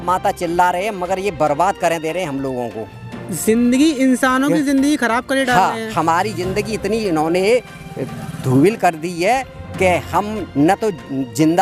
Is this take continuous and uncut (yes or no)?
yes